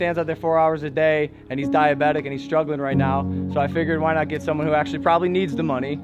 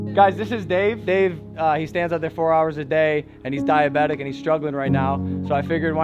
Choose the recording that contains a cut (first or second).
second